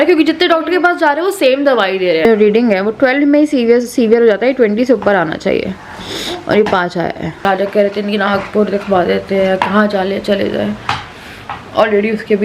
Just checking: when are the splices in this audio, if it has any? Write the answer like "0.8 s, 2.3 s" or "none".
2.2 s, 7.4 s